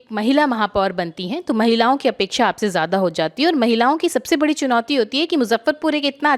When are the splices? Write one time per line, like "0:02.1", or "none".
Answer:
none

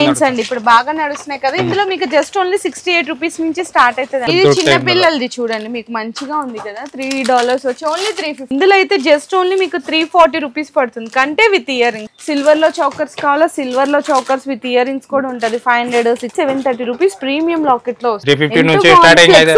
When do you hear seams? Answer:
0:04.3
0:08.4
0:12.1
0:16.3
0:18.2

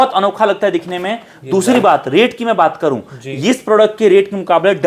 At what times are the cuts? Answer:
none

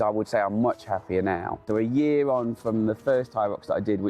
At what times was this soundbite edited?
0:01.6

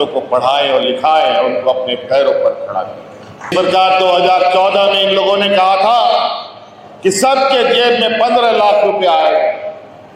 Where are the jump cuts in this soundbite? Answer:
0:03.5

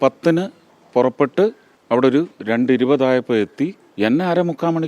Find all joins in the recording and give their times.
0:01.7
0:03.8

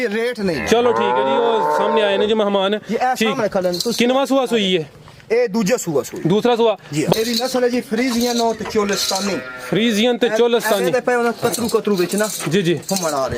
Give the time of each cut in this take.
0:07.1

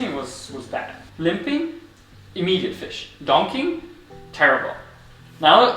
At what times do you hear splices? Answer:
0:01.0

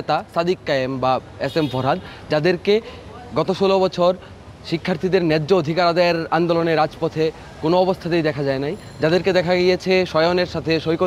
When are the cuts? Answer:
none

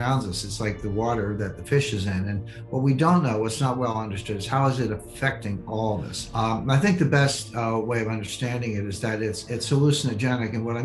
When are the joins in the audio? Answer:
0:06.2
0:09.4

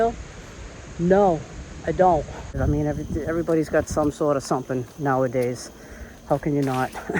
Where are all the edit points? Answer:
0:02.5

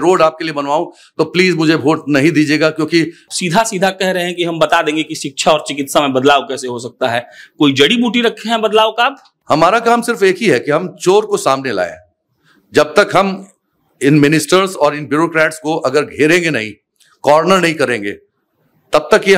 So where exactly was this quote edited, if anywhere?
0:03.2
0:09.3

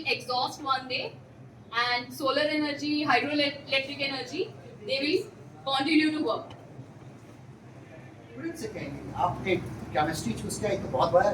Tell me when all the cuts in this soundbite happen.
0:08.4

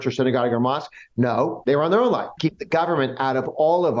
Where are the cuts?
0:01.6
0:02.3

